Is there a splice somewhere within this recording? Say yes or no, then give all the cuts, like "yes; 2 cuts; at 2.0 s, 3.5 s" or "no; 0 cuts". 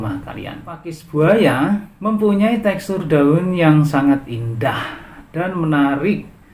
yes; 1 cut; at 1.0 s